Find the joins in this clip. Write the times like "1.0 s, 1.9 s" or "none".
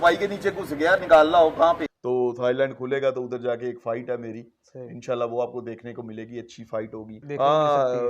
1.9 s, 7.2 s